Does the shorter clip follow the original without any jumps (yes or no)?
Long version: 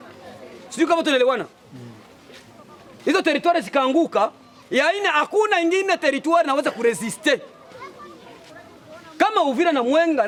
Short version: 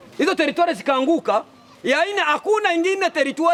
yes